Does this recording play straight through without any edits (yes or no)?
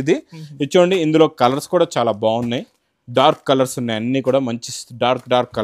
yes